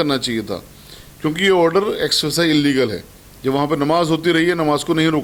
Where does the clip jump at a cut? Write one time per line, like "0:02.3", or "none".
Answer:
none